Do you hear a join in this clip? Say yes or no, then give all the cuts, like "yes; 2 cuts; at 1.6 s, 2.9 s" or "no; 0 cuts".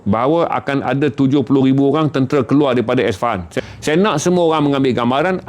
yes; 1 cut; at 3.5 s